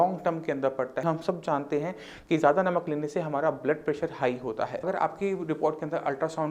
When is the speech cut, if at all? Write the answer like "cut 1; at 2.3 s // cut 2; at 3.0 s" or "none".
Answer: cut 1; at 1.0 s // cut 2; at 4.8 s